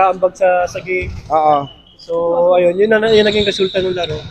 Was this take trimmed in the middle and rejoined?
no; 0 cuts

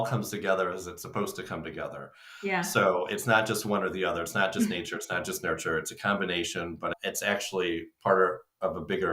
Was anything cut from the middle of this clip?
no; 0 cuts

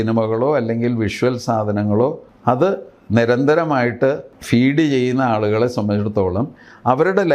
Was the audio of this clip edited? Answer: yes; 2 cuts; at 2.3 s, 4.3 s

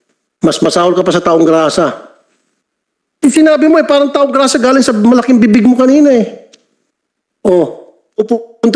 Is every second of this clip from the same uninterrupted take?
yes; 0 cuts

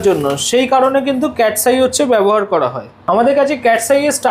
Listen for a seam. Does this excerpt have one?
no; 0 cuts

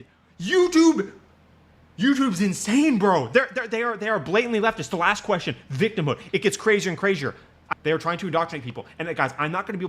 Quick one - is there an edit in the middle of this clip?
yes; 1 cut; at 7.5 s

